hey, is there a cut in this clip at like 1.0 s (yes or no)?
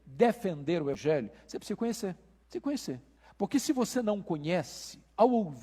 yes